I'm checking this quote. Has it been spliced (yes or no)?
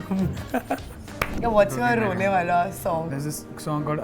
yes